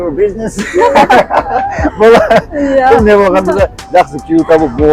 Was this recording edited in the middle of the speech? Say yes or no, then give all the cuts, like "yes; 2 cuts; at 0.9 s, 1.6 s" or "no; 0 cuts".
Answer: no; 0 cuts